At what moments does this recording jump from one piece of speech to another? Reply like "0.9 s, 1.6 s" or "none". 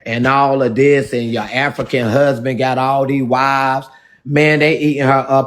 none